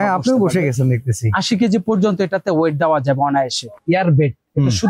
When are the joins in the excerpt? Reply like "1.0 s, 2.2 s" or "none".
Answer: 3.7 s